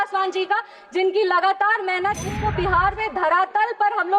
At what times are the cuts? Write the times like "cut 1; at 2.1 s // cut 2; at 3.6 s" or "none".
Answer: cut 1; at 2.4 s